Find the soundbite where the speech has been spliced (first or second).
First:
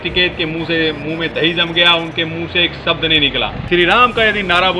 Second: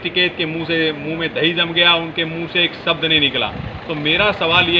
first